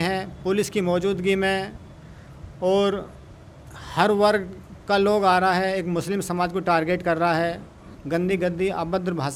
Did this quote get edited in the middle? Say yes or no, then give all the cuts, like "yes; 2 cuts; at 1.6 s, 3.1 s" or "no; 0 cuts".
no; 0 cuts